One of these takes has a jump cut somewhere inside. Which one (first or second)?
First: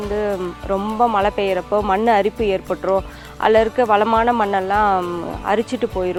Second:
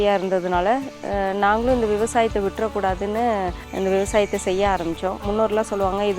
second